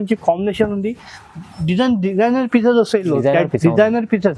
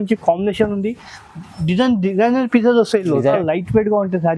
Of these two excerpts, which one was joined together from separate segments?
second; 1 cut; at 3.3 s

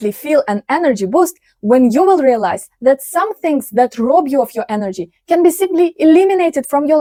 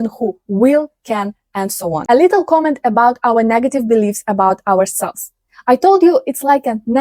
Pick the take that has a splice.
second; 1 cut; at 2.0 s

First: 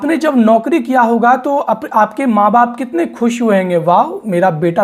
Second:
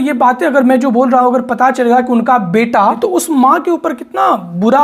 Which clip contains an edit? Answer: second; 1 cut; at 3.0 s

